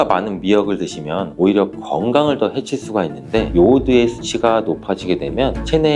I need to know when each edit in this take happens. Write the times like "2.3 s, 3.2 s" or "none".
3.5 s